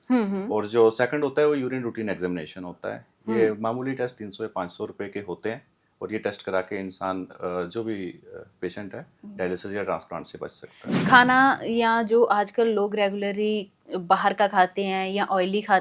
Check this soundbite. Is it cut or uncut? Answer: cut